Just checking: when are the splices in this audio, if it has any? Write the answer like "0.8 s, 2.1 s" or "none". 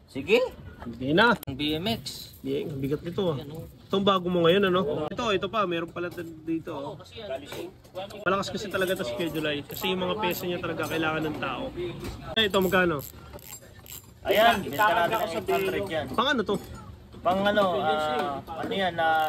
1.5 s, 5.1 s, 12.4 s